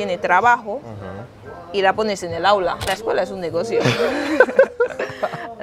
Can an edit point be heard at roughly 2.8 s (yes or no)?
yes